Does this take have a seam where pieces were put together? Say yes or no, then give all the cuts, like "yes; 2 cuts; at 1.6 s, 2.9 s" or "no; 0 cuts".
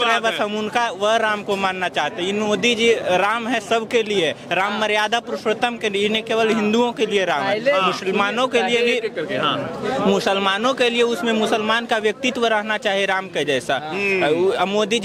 no; 0 cuts